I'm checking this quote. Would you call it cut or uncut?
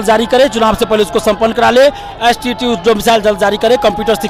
uncut